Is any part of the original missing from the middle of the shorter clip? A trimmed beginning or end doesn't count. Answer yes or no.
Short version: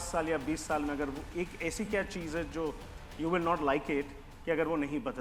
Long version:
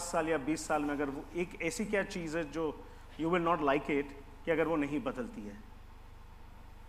no